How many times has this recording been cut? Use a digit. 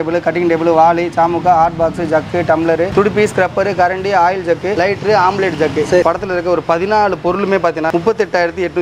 4